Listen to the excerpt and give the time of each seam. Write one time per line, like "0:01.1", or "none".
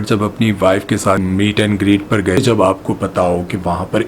0:01.2
0:02.4